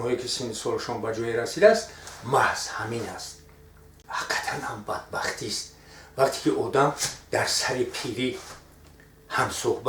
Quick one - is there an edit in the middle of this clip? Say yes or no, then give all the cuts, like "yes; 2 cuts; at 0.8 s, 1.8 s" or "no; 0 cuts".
yes; 1 cut; at 4.0 s